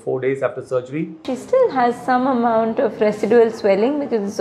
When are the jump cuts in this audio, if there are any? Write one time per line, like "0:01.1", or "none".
0:01.3